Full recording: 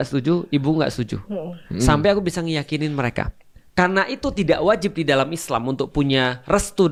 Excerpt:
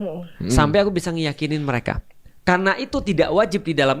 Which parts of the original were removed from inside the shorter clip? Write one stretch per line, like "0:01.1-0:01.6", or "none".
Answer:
none